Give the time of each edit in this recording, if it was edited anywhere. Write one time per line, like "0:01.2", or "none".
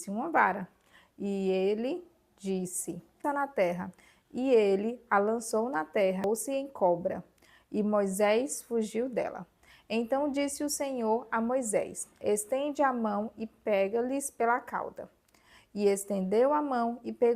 0:03.2
0:06.2